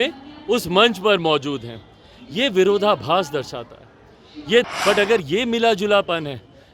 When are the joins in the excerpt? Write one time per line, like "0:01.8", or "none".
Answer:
0:04.7